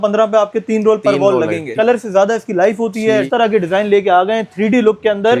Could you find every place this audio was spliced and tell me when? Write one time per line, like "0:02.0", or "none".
0:01.7
0:03.3

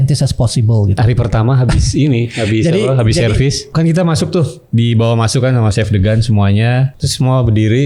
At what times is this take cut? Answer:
0:01.0
0:03.7
0:07.0

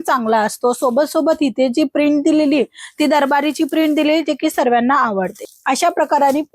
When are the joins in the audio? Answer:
0:05.5

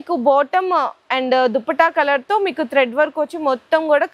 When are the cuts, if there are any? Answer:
none

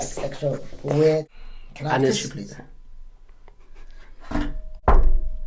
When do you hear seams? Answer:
0:01.4

